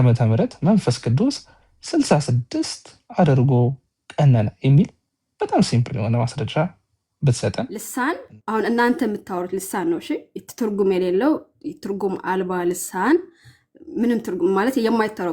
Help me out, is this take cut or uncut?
cut